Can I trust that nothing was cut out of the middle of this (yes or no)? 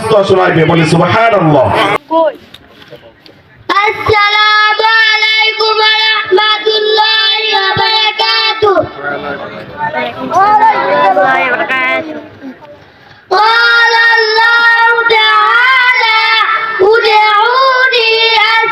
no